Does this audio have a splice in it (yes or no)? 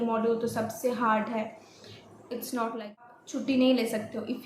yes